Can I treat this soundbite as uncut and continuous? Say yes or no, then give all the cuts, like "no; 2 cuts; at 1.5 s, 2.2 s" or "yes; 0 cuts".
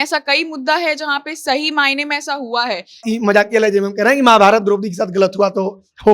no; 1 cut; at 3.0 s